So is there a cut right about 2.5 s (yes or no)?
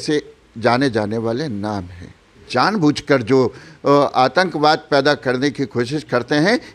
yes